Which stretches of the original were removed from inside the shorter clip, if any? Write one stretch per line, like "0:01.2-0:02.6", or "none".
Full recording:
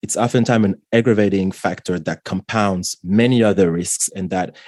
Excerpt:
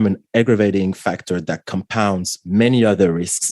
none